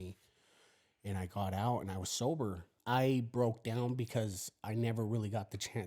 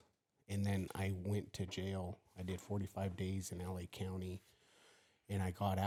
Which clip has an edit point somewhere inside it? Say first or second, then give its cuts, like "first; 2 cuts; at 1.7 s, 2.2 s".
first; 1 cut; at 2.7 s